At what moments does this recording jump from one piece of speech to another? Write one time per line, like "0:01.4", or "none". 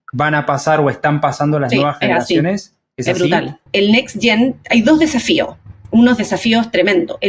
0:03.7